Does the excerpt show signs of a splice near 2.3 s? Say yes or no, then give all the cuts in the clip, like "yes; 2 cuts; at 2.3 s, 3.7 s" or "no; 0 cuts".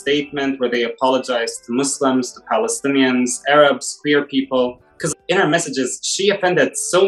no; 1 cut; at 5.1 s